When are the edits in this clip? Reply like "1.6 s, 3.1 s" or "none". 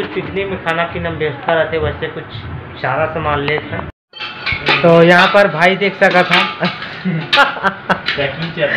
3.9 s

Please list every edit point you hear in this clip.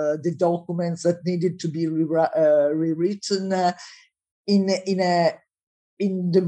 none

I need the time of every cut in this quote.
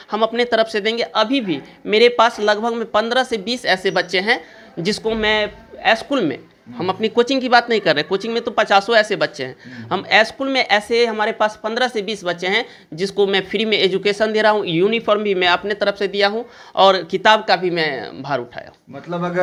none

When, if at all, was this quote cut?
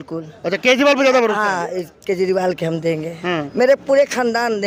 none

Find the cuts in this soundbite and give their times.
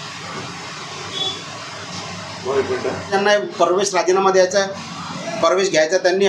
3.1 s

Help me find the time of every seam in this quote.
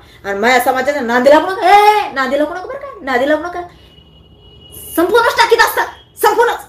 none

